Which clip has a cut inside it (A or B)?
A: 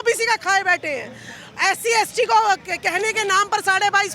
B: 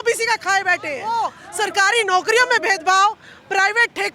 B